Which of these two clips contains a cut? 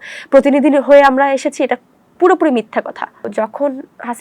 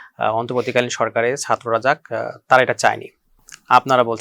first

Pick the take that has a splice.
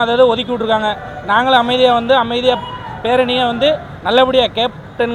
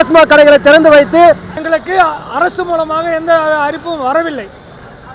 second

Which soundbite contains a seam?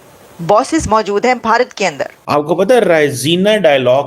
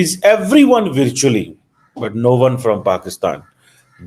first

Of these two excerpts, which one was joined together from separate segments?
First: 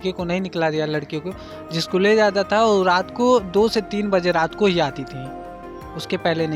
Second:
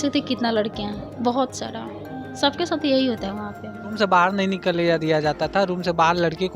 second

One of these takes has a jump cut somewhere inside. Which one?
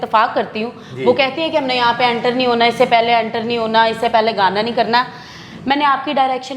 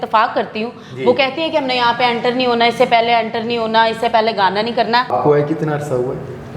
second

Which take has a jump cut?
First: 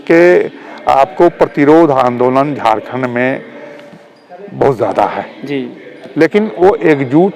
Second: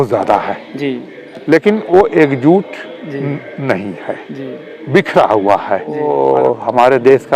second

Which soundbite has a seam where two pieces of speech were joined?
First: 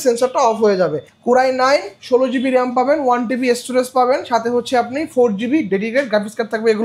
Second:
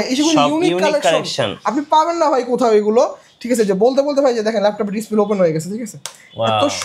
first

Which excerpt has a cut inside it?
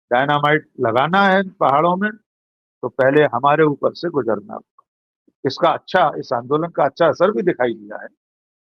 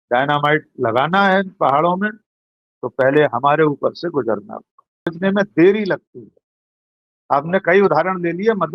second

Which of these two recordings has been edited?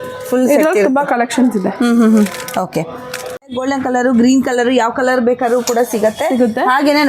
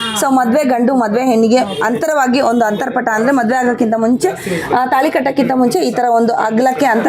first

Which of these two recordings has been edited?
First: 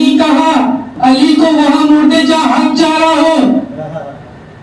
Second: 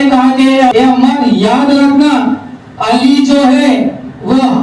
first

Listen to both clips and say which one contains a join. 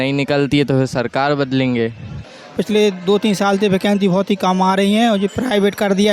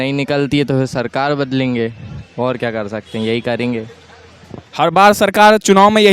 first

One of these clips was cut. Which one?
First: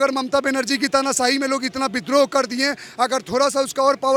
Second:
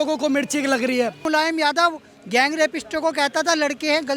second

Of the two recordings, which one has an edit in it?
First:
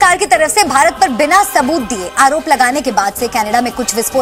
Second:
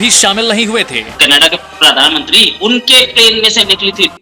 second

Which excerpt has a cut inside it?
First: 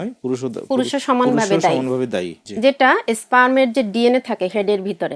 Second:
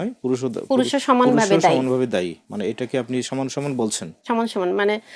first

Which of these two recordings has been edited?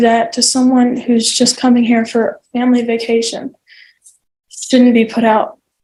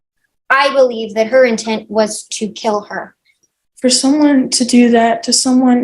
second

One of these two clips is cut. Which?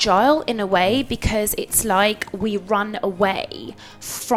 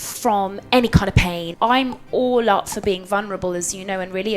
second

